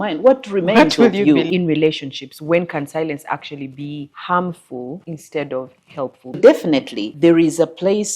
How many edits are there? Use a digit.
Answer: 5